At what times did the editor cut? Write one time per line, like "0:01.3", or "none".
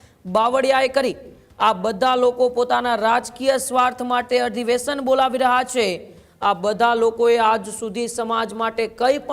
none